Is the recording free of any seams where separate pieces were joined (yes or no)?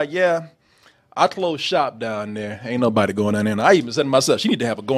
yes